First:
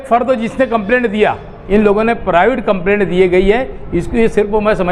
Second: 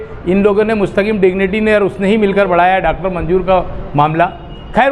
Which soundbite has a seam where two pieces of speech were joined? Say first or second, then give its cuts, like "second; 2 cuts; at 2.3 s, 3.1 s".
first; 1 cut; at 1.5 s